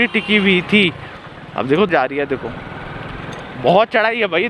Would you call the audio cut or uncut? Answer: cut